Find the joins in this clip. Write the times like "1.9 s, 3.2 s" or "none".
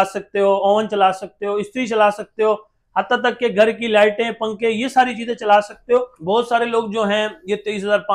6.2 s